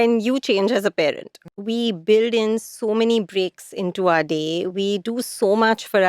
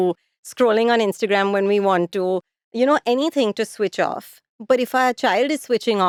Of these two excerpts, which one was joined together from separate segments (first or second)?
first